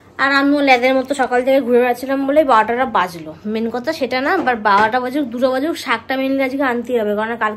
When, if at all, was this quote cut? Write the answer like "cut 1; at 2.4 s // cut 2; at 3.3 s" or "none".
none